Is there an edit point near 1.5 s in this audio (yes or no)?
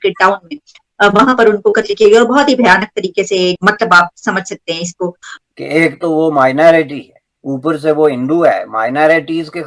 no